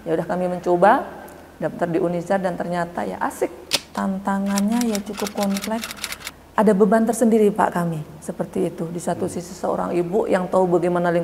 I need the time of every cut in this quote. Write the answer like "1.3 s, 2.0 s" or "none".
3.6 s